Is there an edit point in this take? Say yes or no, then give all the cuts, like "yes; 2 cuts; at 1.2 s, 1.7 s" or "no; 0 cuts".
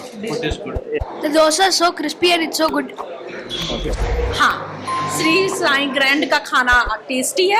yes; 1 cut; at 4.0 s